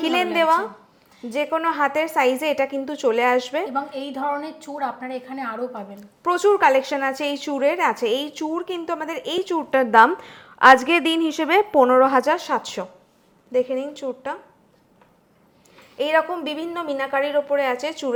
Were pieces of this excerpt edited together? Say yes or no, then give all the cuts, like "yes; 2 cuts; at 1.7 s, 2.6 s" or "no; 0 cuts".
no; 0 cuts